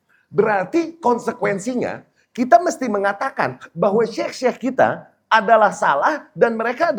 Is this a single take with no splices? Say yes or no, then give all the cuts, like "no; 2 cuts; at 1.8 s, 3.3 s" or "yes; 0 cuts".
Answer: yes; 0 cuts